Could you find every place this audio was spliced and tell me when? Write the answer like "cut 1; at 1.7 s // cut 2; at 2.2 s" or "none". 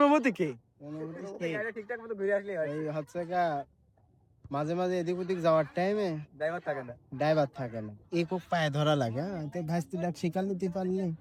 none